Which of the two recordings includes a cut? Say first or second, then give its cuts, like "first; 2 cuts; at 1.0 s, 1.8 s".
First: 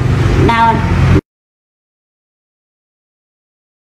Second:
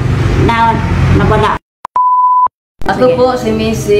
second; 1 cut; at 1.2 s